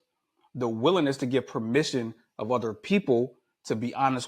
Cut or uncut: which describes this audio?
uncut